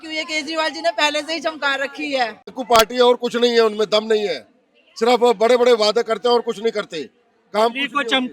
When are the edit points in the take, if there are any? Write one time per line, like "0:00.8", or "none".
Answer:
0:02.5